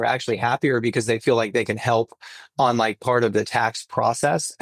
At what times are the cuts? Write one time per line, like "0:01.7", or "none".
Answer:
none